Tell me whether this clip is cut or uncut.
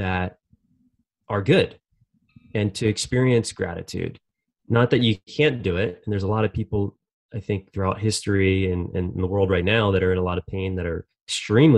uncut